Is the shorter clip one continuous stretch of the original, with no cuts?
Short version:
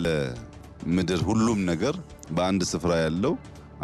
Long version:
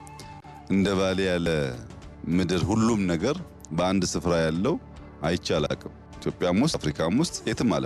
yes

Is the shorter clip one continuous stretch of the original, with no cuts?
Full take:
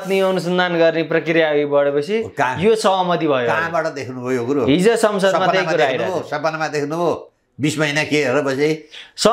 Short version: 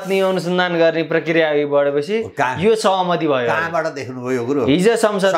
yes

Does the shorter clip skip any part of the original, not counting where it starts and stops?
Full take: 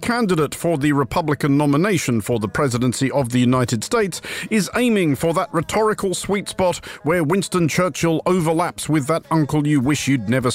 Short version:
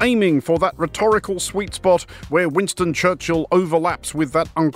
no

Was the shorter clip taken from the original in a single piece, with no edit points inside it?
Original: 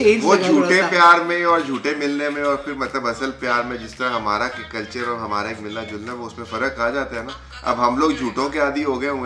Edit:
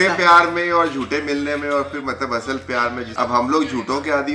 no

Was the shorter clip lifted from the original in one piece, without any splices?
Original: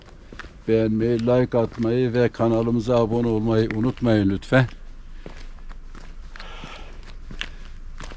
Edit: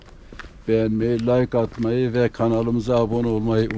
yes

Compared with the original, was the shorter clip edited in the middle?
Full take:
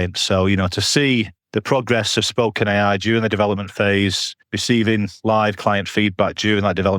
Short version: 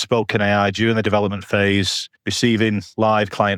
no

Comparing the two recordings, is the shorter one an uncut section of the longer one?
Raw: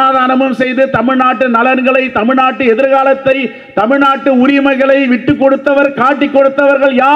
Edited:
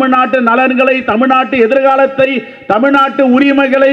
yes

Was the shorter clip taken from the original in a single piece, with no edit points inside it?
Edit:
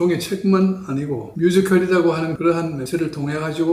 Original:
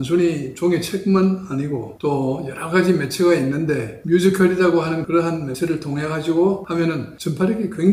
no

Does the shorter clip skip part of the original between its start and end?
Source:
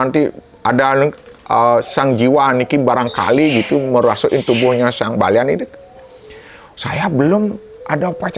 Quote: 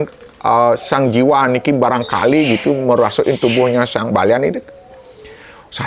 no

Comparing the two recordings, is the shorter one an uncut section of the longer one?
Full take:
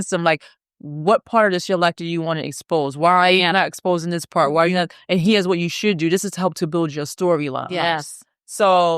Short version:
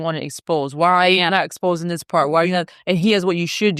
yes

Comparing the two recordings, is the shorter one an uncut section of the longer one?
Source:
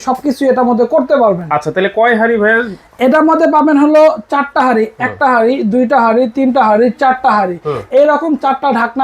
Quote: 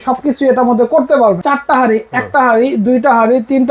no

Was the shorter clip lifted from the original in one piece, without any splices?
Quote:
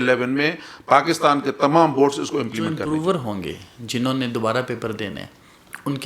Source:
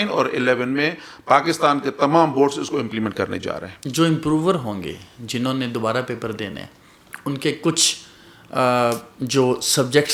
no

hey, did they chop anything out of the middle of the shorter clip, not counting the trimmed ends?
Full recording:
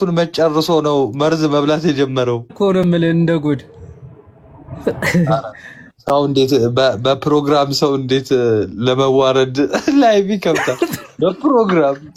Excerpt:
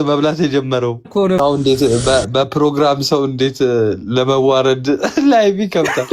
yes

